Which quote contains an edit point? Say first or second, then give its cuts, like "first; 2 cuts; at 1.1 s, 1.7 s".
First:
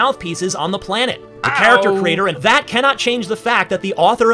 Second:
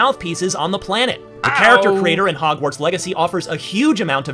first; 1 cut; at 2.4 s